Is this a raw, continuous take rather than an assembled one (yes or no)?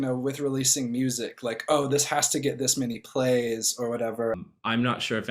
no